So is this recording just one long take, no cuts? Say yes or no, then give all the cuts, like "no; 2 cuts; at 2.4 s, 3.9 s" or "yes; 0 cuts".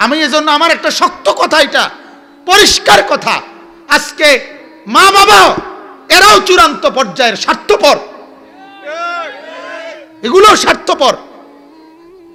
yes; 0 cuts